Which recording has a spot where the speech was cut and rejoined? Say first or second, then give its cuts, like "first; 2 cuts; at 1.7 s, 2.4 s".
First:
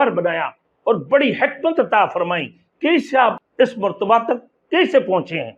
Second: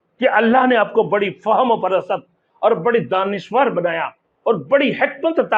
first; 1 cut; at 3.4 s